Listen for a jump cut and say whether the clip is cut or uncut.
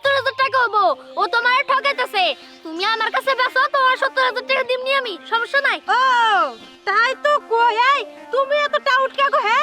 uncut